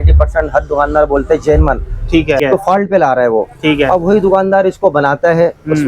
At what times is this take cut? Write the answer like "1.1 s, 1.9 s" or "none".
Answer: 2.4 s

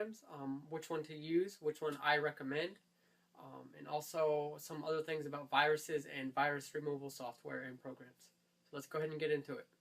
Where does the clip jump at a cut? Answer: 6.3 s

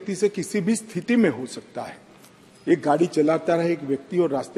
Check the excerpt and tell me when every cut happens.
none

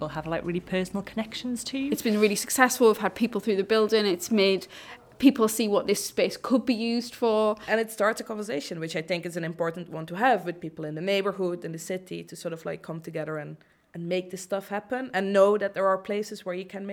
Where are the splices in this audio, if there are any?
2.0 s, 7.6 s

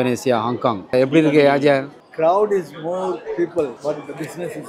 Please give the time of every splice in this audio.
0.9 s, 2.0 s, 3.8 s

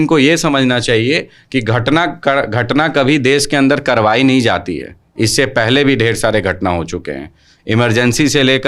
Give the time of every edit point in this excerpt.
none

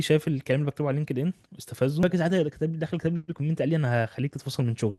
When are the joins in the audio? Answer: 2.0 s

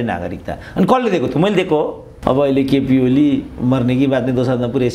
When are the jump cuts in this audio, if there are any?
2.1 s

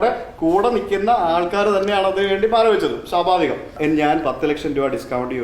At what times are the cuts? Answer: 3.7 s

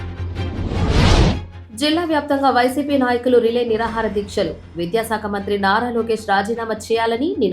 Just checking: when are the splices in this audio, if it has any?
1.5 s

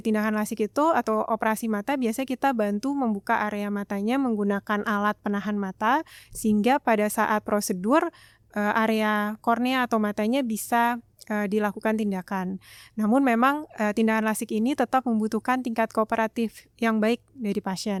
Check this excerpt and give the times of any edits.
none

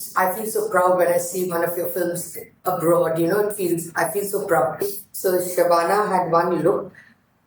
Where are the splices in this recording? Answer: 5.0 s

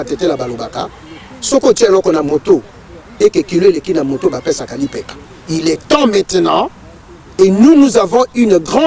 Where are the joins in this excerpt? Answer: none

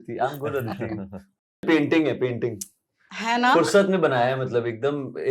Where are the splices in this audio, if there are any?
1.6 s

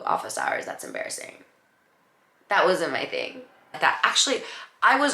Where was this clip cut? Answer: 3.8 s

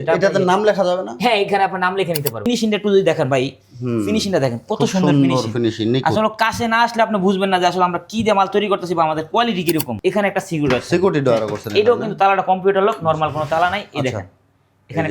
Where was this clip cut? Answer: 2.5 s, 9.9 s

